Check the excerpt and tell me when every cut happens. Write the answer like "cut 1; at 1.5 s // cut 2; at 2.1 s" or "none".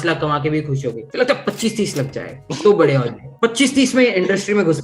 cut 1; at 1.0 s